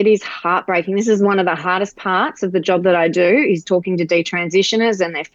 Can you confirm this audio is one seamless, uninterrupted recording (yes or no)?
yes